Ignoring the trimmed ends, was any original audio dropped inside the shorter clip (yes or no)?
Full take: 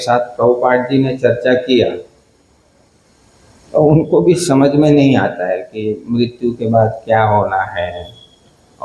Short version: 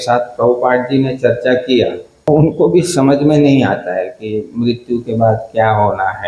yes